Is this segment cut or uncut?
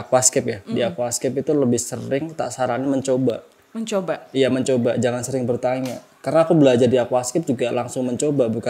uncut